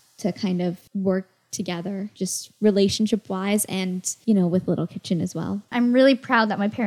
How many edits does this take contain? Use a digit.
4